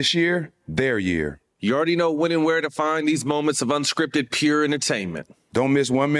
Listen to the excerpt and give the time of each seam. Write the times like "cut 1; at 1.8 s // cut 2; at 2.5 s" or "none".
none